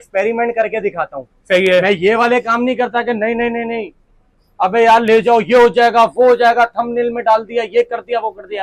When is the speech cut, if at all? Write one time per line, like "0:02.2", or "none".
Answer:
none

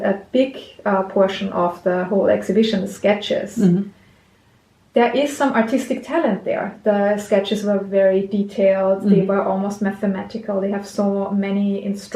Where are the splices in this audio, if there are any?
none

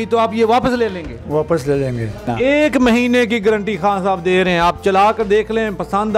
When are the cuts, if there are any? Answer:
0:02.3

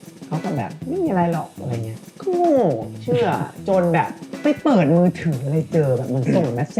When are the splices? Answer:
none

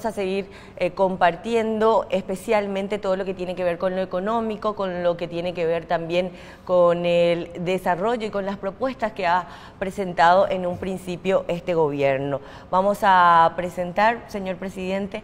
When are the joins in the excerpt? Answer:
0:08.1

